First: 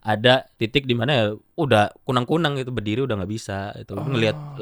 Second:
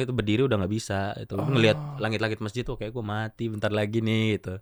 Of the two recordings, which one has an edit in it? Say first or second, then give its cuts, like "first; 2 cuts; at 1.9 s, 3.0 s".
first; 1 cut; at 0.9 s